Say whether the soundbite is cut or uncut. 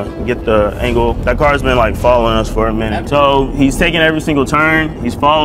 uncut